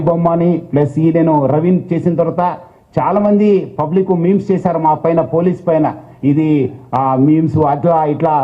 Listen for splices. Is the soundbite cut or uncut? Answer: cut